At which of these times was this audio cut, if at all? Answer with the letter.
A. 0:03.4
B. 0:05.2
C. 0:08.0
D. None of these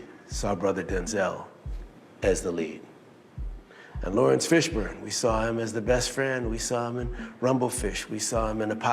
A